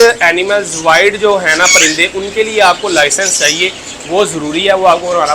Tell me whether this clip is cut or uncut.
uncut